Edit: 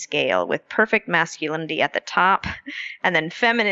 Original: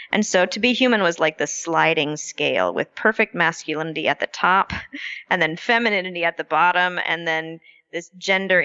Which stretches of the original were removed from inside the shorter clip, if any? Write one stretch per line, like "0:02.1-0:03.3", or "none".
none